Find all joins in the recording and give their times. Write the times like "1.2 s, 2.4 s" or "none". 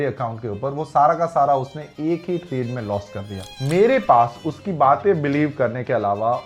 3.5 s